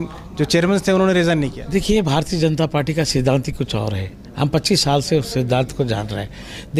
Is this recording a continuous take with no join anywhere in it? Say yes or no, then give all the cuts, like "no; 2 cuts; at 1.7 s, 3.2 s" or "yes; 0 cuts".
yes; 0 cuts